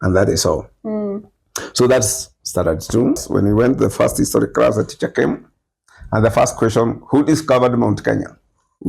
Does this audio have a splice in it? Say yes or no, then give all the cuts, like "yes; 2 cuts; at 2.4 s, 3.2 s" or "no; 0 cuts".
yes; 1 cut; at 3.2 s